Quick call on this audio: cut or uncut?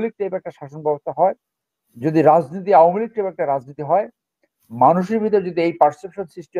uncut